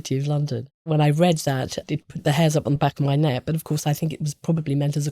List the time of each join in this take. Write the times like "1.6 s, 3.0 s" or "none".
0.8 s, 1.8 s, 2.8 s